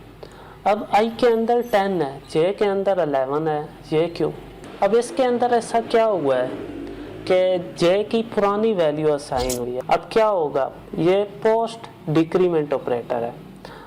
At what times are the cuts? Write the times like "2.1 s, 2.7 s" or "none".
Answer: 9.8 s